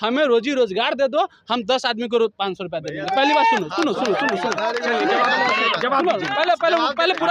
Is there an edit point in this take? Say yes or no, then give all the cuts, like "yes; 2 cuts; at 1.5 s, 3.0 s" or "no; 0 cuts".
no; 0 cuts